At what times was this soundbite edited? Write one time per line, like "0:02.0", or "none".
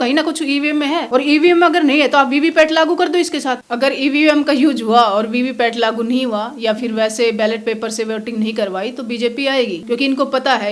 0:01.1
0:03.6
0:09.8

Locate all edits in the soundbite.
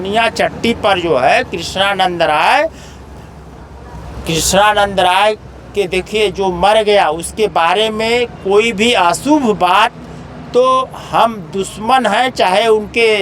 none

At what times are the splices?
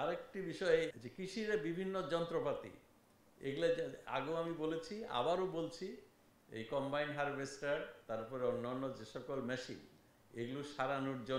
0:01.0

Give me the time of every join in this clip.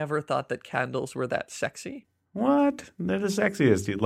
0:02.0

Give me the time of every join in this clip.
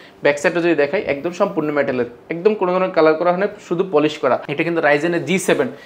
0:04.5

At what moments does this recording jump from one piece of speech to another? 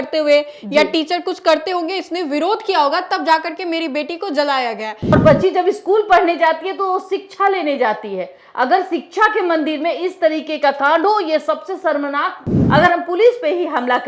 0:05.1
0:12.5

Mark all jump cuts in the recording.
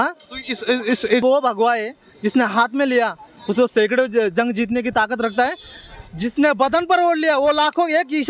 0:01.2

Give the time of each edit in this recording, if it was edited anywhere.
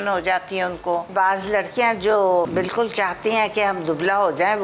0:01.1
0:02.5

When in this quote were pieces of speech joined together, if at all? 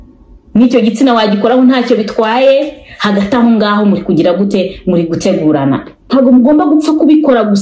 0:05.9

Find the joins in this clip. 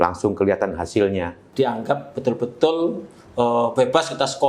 0:01.4

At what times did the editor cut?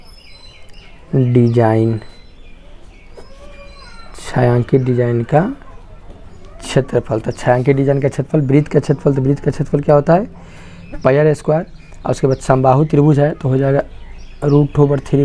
none

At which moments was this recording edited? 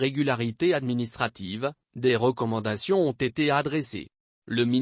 0:03.9

